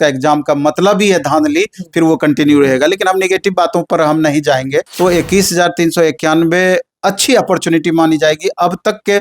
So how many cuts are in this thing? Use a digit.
1